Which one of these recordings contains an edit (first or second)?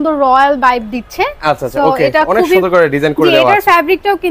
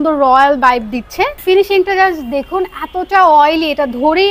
second